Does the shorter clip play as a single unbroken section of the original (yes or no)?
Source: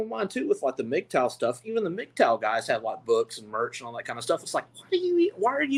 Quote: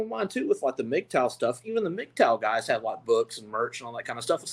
yes